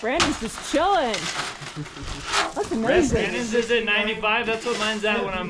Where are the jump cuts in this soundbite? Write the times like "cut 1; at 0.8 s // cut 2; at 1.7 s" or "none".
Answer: none